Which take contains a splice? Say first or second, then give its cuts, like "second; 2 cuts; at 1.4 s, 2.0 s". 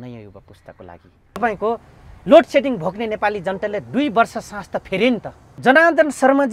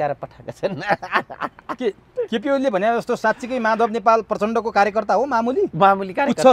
first; 2 cuts; at 1.4 s, 5.5 s